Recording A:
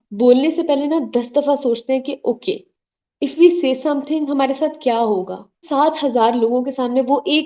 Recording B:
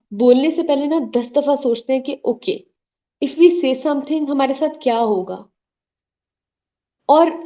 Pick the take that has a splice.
A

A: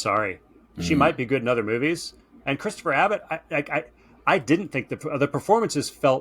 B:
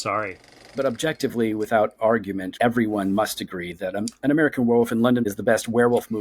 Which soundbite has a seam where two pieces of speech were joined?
B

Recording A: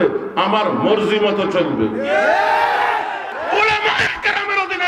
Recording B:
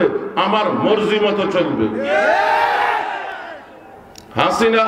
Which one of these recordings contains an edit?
A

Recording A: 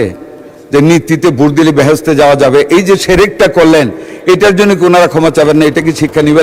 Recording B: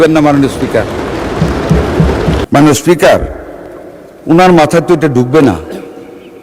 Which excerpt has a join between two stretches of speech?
B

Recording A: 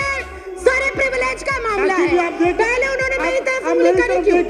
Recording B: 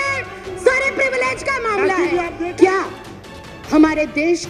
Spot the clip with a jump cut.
B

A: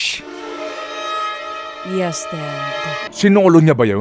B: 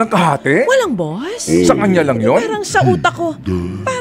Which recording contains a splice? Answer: A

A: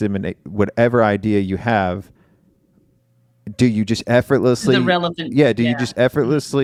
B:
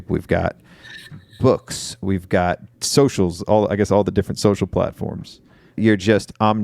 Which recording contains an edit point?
B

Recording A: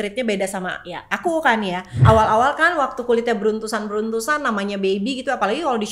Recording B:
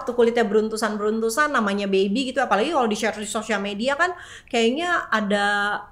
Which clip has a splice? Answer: A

